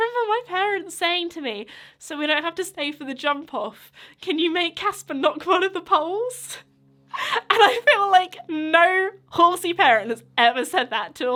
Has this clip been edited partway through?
no; 0 cuts

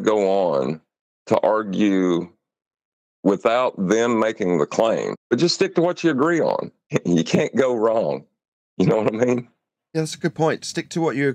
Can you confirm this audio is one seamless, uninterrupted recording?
no; 2 cuts; at 5.1 s, 6.8 s

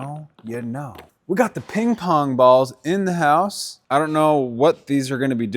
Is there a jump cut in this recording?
yes; 2 cuts; at 1.1 s, 3.7 s

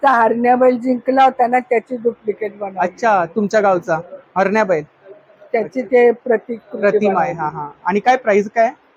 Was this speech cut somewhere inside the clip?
no; 0 cuts

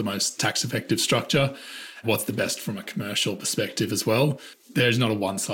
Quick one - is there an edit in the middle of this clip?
yes; 2 cuts; at 2.0 s, 4.7 s

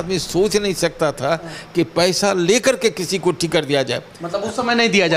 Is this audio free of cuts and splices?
yes; 0 cuts

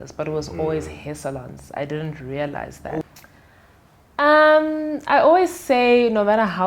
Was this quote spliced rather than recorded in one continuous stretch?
yes; 1 cut; at 3.0 s

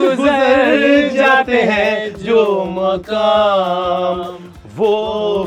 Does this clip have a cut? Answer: no; 0 cuts

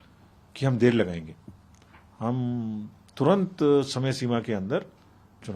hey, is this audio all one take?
yes; 0 cuts

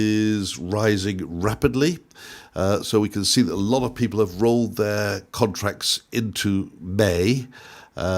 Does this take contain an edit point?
no; 0 cuts

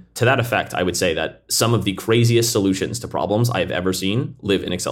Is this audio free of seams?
yes; 0 cuts

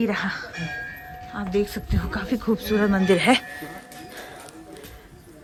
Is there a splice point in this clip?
no; 0 cuts

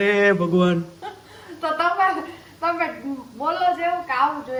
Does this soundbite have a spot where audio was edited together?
no; 0 cuts

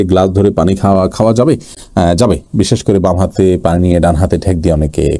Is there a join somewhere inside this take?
no; 0 cuts

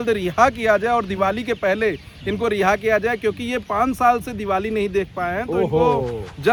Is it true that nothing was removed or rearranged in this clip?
yes; 0 cuts

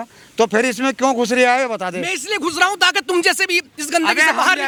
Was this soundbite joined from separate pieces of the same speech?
no; 0 cuts

